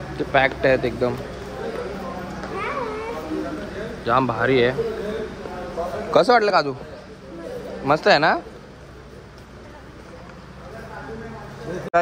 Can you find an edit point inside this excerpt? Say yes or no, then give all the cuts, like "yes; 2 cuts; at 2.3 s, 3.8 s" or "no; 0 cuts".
no; 0 cuts